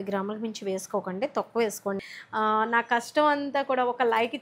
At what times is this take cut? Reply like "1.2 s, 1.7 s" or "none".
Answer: 2.0 s